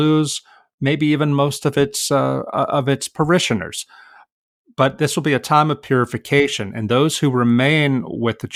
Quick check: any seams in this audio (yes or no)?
no